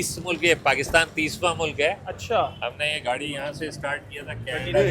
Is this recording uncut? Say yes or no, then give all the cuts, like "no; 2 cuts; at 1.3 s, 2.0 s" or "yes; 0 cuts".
yes; 0 cuts